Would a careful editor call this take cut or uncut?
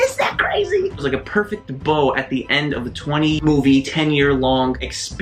cut